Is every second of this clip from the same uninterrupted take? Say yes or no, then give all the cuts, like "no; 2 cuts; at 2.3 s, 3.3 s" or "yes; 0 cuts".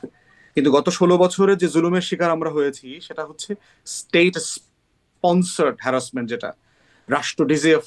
yes; 0 cuts